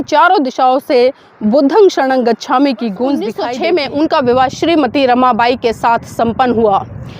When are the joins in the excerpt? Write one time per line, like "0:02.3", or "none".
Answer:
0:03.4